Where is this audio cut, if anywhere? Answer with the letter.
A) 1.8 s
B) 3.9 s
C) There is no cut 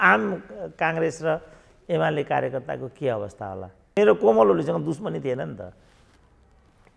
B